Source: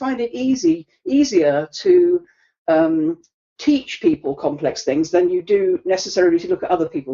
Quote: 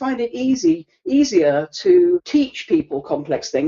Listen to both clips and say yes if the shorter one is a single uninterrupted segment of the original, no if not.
no